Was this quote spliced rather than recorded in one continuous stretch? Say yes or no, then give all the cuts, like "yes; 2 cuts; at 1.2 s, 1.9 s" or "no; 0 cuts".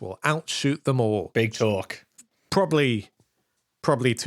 yes; 1 cut; at 1.3 s